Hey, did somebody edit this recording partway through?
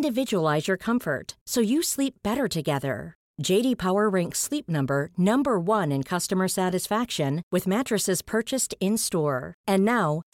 no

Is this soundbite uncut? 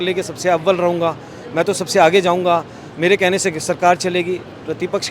yes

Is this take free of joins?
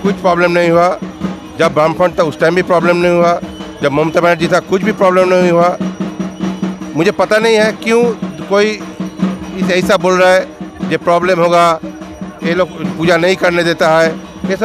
yes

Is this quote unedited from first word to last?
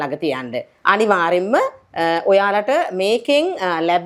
yes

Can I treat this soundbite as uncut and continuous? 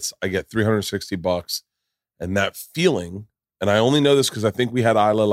yes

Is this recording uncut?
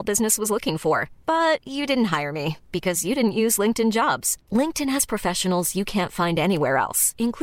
yes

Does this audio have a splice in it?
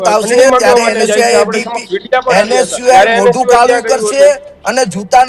no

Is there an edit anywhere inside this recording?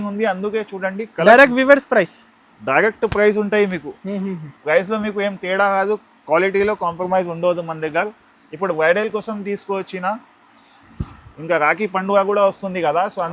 no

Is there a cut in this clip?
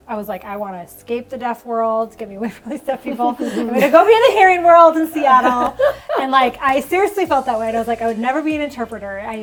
no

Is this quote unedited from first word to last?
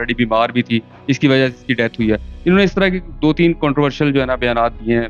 yes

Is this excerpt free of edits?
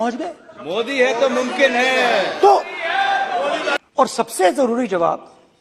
no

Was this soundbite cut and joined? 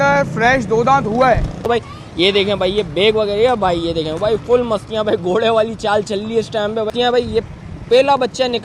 yes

